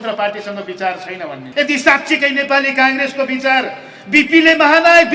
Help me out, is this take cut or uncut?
cut